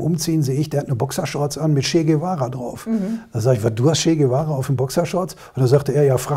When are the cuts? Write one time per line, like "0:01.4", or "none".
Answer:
none